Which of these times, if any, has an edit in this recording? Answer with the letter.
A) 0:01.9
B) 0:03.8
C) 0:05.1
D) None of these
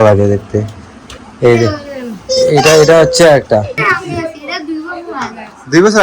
B